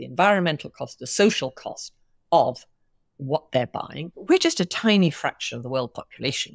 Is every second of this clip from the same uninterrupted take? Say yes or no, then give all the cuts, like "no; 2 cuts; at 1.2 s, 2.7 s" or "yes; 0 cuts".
no; 1 cut; at 4.0 s